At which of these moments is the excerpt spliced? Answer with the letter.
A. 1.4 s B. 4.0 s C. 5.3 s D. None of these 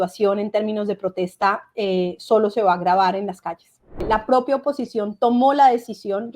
B